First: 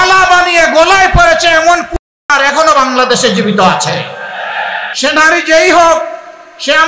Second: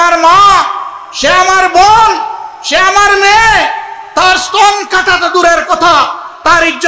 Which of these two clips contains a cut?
first; 1 cut; at 4.8 s

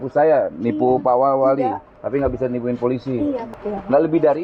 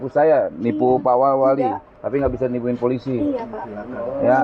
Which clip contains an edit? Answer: first; 1 cut; at 3.5 s

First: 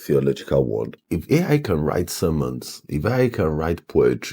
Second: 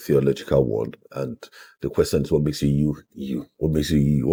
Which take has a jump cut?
first; 1 cut; at 1.0 s

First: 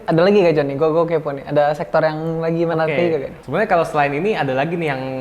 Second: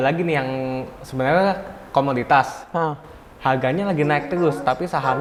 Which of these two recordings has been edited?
first; 1 cut; at 3.4 s

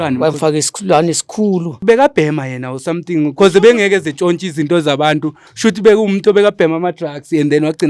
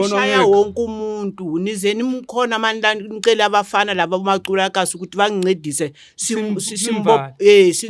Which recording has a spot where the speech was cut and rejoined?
first; 1 cut; at 1.7 s

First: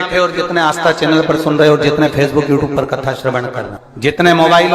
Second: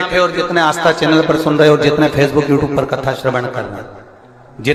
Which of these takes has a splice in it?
first; 1 cut; at 3.8 s

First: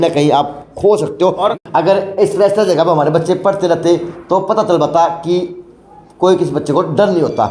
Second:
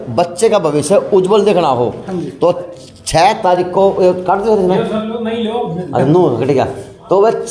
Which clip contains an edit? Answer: first; 1 cut; at 1.5 s

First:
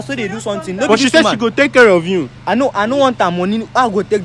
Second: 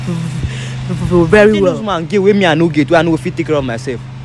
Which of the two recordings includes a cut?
second; 1 cut; at 1.9 s

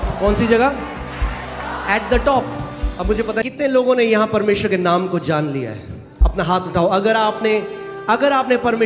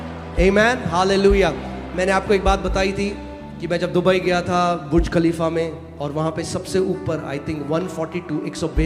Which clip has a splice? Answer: first; 1 cut; at 3.4 s

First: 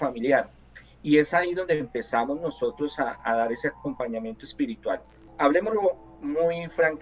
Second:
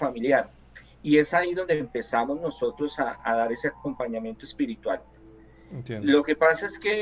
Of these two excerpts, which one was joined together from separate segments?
first; 1 cut; at 5.3 s

